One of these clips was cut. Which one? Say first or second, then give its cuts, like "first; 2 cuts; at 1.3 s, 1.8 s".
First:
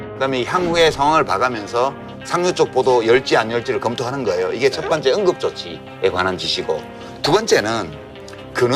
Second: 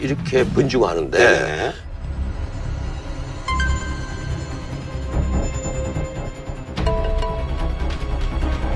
second; 1 cut; at 3.1 s